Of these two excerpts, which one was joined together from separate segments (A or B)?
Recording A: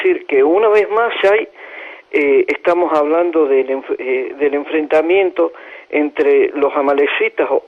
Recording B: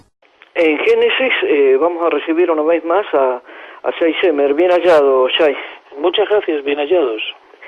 A